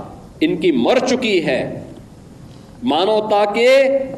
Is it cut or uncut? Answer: uncut